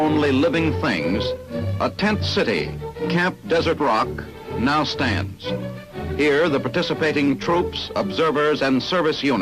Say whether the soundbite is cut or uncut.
cut